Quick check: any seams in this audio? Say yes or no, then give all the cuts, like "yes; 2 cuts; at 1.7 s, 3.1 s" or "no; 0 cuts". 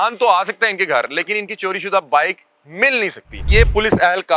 yes; 1 cut; at 3.4 s